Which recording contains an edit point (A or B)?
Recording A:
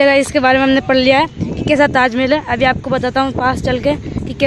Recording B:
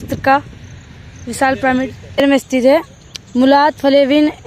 B